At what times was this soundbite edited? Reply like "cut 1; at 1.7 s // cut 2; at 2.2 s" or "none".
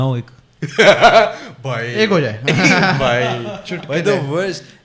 none